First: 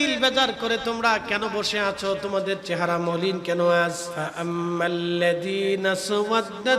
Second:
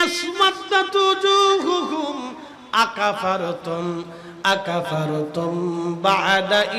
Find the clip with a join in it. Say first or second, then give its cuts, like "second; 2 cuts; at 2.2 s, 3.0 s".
first; 1 cut; at 4.1 s